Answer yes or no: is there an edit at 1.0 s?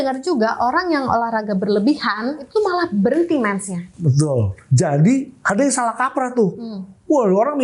no